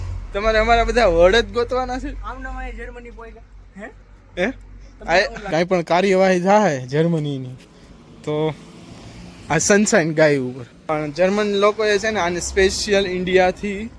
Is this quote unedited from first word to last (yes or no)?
no